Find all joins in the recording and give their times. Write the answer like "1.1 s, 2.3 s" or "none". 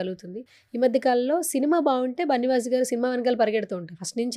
none